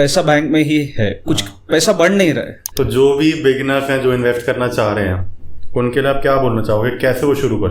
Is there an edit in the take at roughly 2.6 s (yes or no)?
yes